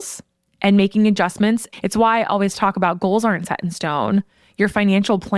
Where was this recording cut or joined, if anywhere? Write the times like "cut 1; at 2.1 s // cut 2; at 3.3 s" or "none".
cut 1; at 1.7 s

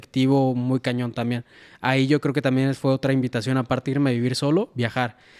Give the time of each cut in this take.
none

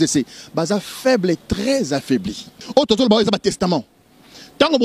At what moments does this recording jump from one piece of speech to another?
cut 1; at 2.5 s

